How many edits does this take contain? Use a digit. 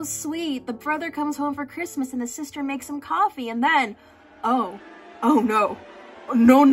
0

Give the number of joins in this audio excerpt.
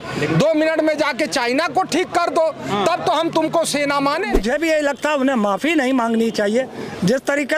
1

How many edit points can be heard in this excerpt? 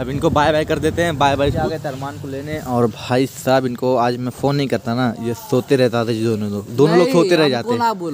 0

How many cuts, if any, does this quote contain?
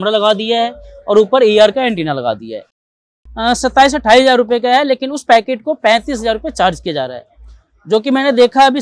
1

